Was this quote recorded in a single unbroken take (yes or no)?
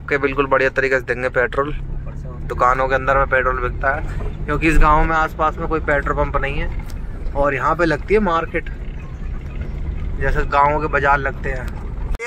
yes